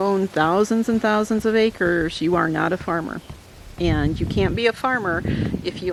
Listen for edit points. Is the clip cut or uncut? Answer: uncut